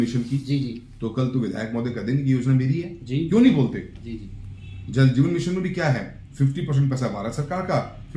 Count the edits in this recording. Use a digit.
0